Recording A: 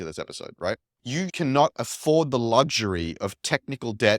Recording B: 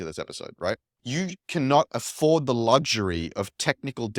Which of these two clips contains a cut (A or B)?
A